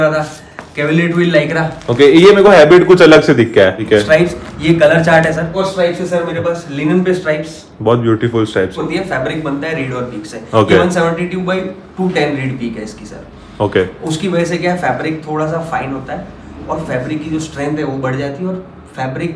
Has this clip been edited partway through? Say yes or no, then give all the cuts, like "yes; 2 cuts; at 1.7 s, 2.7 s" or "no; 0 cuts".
yes; 3 cuts; at 3.8 s, 5.6 s, 8.8 s